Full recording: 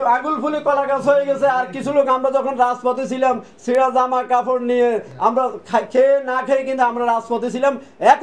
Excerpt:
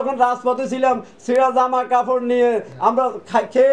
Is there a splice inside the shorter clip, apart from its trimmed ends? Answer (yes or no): no